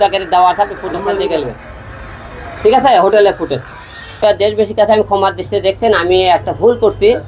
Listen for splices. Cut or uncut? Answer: cut